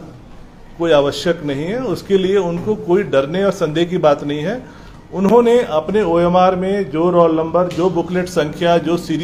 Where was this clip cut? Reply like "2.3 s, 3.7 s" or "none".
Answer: none